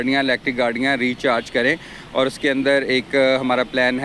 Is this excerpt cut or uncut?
uncut